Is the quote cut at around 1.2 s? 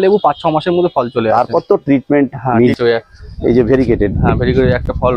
no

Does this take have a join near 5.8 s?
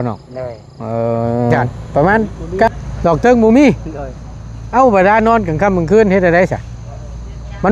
no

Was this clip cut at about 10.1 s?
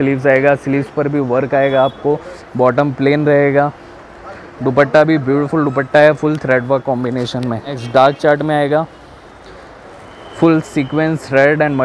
no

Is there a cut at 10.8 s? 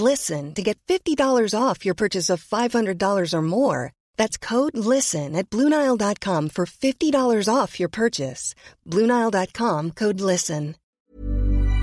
yes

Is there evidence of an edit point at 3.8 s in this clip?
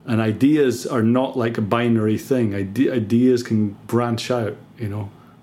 yes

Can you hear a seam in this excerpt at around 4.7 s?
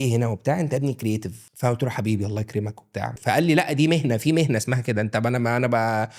no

